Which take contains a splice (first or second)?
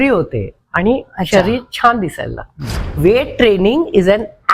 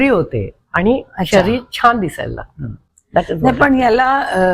first